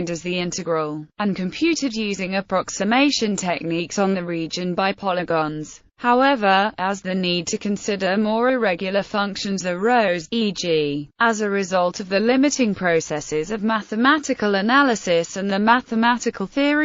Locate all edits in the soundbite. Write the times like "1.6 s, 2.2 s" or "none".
10.0 s